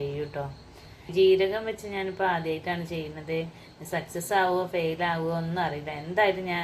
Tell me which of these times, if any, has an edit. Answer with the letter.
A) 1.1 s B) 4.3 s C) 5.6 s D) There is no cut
A